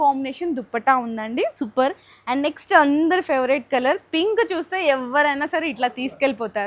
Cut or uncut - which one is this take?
uncut